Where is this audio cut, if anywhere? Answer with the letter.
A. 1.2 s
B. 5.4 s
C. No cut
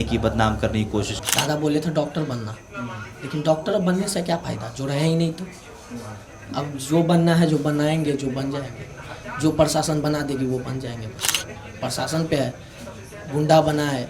A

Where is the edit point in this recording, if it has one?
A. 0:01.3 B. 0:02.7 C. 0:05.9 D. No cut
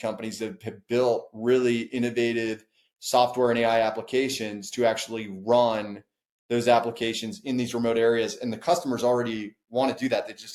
D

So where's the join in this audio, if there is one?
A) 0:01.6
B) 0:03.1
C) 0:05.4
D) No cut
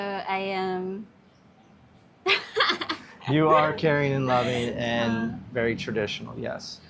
D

